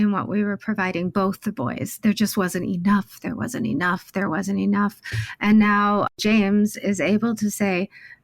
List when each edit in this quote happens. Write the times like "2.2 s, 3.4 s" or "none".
6.1 s